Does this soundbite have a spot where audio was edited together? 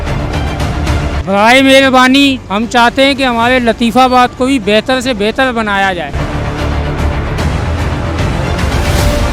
yes; 2 cuts; at 1.2 s, 6.1 s

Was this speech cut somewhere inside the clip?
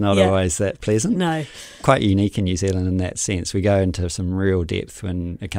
yes; 1 cut; at 1.8 s

